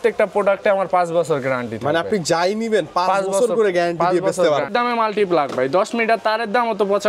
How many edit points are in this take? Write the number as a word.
one